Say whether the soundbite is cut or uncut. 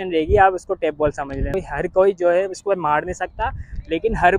cut